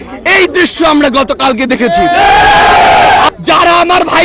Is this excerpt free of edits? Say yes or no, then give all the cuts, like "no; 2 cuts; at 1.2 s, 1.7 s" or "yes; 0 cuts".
no; 1 cut; at 3.3 s